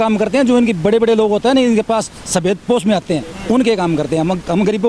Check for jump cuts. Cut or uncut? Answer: uncut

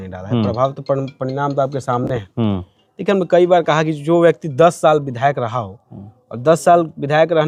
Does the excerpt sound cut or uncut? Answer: uncut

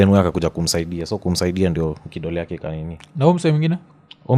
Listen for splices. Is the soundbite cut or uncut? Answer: uncut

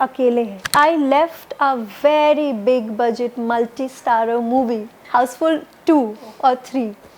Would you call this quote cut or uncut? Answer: cut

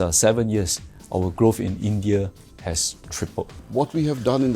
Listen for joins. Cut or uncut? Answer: cut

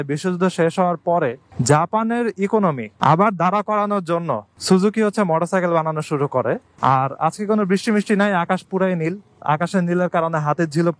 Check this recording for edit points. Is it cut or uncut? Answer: cut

